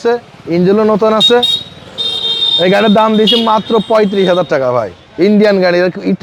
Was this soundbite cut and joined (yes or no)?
no